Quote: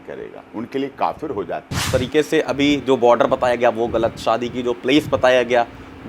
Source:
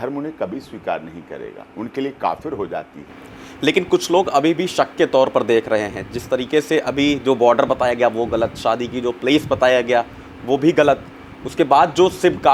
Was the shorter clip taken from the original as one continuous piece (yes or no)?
no